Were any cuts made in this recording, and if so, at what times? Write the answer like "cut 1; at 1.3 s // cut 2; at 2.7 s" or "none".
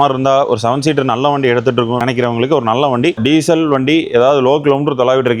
cut 1; at 3.2 s